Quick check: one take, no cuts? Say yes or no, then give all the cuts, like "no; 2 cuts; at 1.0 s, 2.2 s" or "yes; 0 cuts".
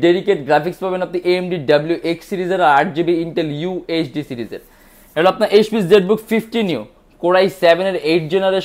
yes; 0 cuts